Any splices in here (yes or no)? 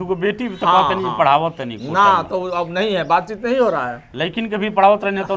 no